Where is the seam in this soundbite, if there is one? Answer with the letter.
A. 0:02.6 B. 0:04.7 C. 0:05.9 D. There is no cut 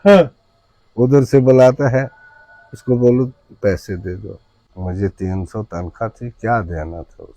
B